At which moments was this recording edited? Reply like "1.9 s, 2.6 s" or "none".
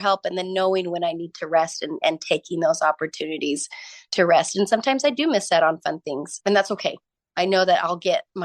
6.3 s